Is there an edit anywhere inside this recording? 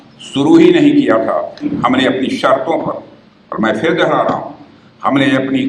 yes; 1 cut; at 1.7 s

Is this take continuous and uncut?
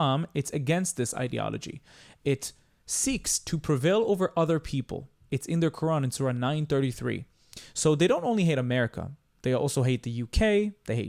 yes; 0 cuts

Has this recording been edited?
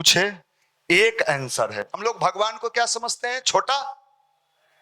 yes; 1 cut; at 2.0 s

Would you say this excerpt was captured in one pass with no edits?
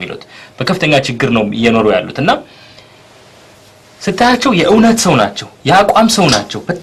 yes; 0 cuts

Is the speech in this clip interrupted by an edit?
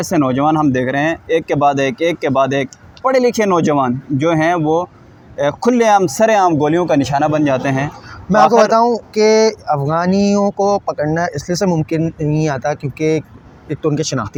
no; 0 cuts

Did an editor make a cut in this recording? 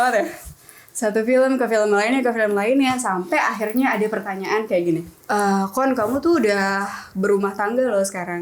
yes; 1 cut; at 5.1 s

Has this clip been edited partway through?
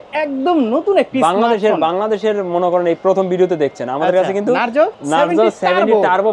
yes; 1 cut; at 5.0 s

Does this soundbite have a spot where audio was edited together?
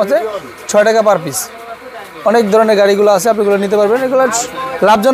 no; 0 cuts

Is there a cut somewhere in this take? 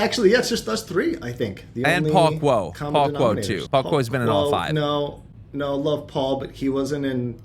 yes; 1 cut; at 3.6 s

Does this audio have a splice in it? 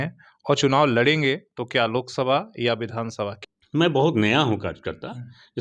yes; 1 cut; at 3.3 s

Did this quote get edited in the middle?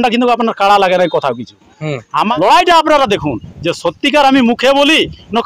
yes; 1 cut; at 2.3 s

